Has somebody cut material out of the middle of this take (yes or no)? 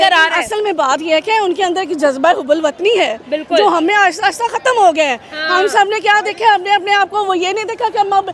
no